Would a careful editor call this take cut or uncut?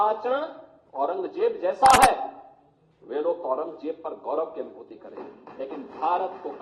uncut